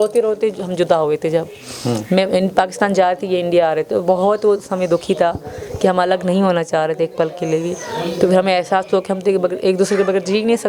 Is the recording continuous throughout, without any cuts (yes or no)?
yes